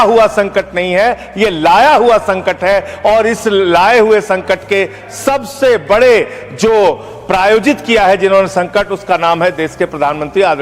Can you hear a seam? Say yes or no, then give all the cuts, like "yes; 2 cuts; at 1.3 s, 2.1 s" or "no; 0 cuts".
no; 0 cuts